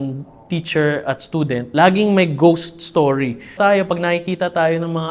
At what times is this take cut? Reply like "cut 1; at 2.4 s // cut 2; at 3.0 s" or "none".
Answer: cut 1; at 1.6 s // cut 2; at 3.5 s